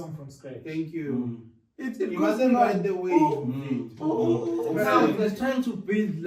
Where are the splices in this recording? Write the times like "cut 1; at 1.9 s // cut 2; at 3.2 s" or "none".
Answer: cut 1; at 5.1 s